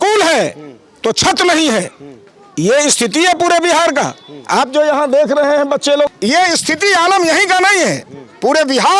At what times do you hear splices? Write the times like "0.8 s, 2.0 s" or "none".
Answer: none